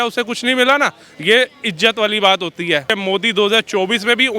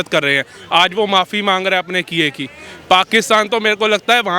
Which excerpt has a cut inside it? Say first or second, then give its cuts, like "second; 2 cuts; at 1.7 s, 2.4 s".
first; 1 cut; at 3.0 s